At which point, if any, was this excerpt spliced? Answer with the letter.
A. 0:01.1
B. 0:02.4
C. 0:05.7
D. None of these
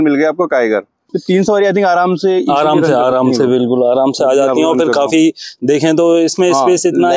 A